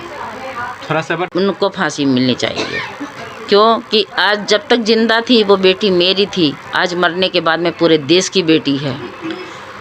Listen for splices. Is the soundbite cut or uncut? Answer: cut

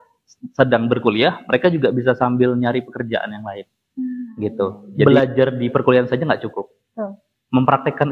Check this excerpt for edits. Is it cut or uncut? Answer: cut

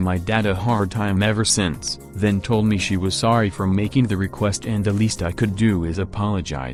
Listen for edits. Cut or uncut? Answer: uncut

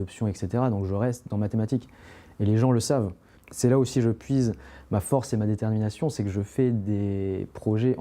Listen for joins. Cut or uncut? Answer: cut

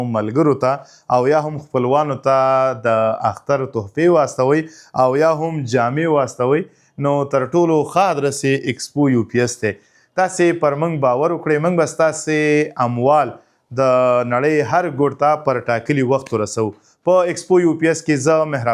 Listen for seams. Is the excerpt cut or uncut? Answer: uncut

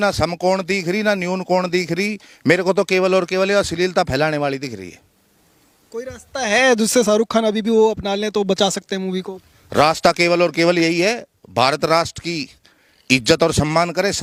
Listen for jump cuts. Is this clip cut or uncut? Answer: uncut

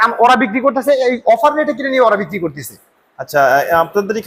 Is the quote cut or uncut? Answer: uncut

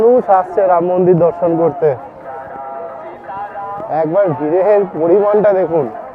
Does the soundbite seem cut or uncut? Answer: uncut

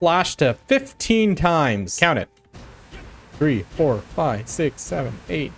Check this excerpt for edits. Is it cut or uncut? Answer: cut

